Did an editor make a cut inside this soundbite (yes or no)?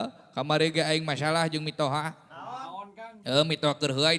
no